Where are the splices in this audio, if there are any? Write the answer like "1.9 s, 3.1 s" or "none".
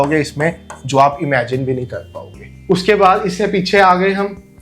none